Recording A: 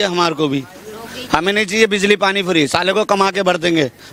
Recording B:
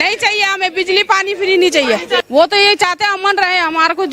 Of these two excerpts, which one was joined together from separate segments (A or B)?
B